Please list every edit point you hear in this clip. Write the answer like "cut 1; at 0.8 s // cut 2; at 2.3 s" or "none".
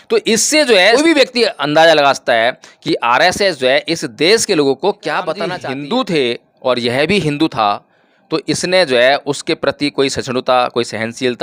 cut 1; at 0.9 s // cut 2; at 5.6 s